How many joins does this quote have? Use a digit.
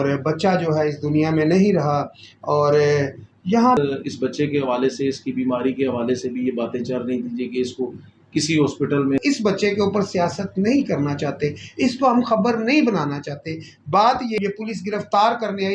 3